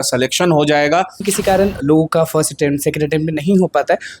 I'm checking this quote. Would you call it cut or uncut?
cut